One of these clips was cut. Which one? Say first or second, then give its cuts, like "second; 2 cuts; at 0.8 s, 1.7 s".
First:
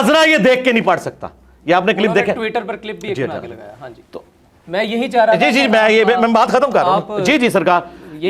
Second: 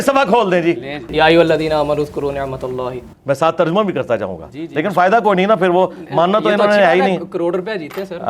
second; 2 cuts; at 1.1 s, 3.1 s